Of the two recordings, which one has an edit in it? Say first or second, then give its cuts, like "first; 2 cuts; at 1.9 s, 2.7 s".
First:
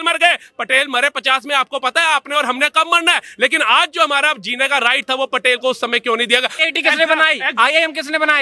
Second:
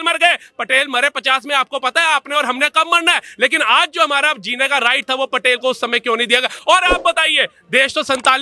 first; 1 cut; at 6.6 s